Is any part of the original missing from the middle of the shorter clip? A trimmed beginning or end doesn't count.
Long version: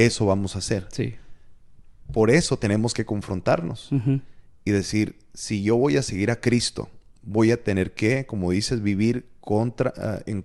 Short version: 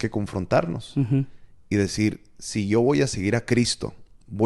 no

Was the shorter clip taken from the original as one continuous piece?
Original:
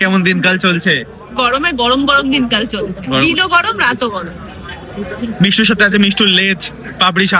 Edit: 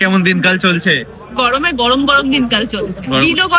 yes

